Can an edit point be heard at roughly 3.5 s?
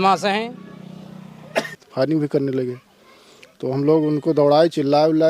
no; 1 cut; at 1.8 s

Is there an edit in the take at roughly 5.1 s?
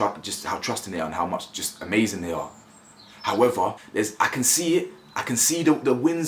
no; 1 cut; at 3.8 s

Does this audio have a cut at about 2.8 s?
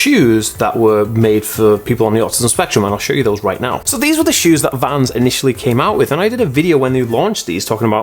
no; 0 cuts

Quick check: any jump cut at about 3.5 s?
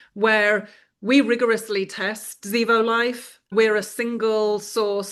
yes; 1 cut; at 3.5 s

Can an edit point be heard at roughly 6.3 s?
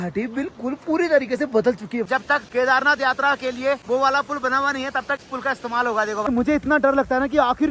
yes; 4 cuts; at 2.1 s, 3.8 s, 5.3 s, 6.3 s

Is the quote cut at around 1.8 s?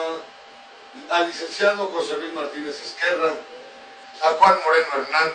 no; 1 cut; at 3.6 s

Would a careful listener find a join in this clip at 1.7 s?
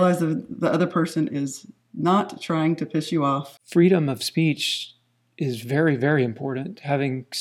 no; 1 cut; at 3.5 s

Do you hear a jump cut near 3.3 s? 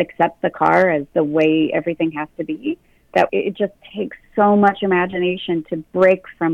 yes; 3 cuts; at 1.1 s, 3.3 s, 5.7 s

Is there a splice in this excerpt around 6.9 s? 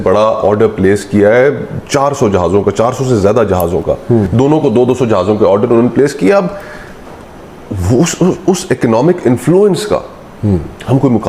no; 1 cut; at 4.3 s

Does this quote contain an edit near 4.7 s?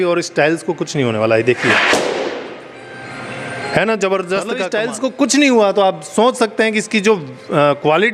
yes; 1 cut; at 4.7 s

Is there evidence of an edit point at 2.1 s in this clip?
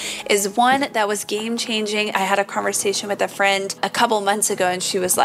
yes; 1 cut; at 2.1 s

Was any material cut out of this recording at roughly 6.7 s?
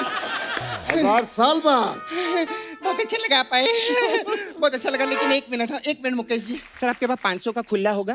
yes; 1 cut; at 6.7 s

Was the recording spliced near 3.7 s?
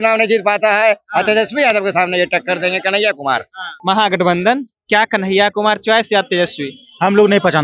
yes; 1 cut; at 3.7 s

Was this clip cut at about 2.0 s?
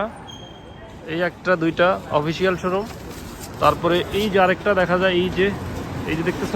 no; 0 cuts

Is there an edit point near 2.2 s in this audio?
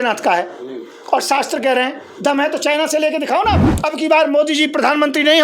no; 1 cut; at 3.7 s

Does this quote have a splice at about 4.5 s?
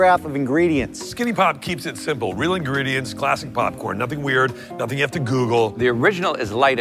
no; 2 cuts; at 1.0 s, 5.8 s

